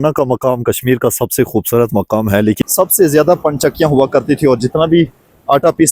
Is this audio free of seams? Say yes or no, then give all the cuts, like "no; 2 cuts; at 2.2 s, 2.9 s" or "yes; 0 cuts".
no; 1 cut; at 2.6 s